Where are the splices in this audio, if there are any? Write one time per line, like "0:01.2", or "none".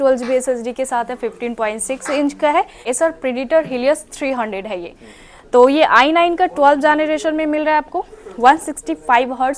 0:02.8

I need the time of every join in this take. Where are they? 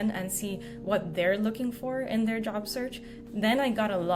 0:03.1

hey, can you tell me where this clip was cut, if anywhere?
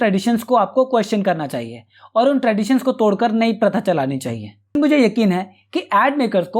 0:04.7

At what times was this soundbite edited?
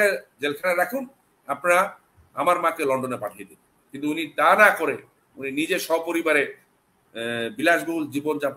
none

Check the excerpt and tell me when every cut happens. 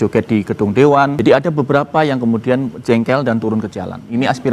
0:01.2

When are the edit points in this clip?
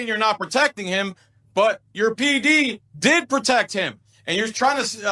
none

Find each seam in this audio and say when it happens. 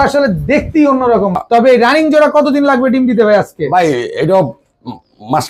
0:01.4

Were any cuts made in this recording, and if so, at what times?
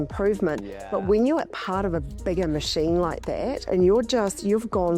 0:03.6

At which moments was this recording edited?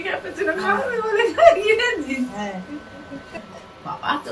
0:03.4

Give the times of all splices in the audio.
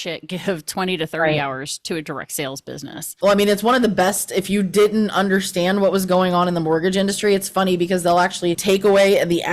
0:03.1
0:08.6

